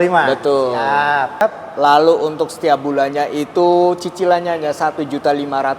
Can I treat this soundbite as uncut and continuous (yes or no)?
no